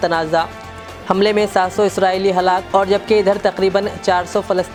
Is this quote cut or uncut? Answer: uncut